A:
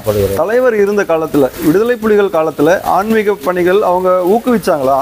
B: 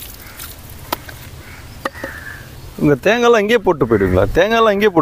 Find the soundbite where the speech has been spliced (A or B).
B